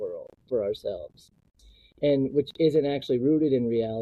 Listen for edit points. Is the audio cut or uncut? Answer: uncut